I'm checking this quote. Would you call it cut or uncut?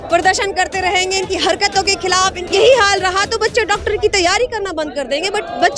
cut